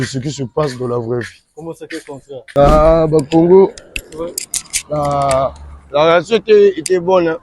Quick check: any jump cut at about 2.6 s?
yes; 1 cut; at 2.6 s

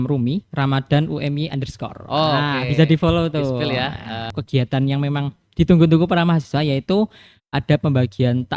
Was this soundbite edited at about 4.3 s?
yes; 1 cut; at 4.3 s

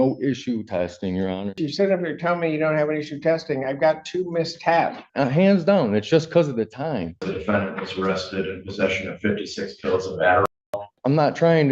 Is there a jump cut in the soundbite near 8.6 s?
no; 4 cuts; at 1.6 s, 5.0 s, 7.3 s, 10.5 s

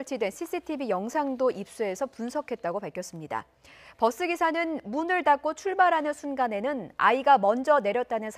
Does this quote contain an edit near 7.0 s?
no; 1 cut; at 4.2 s

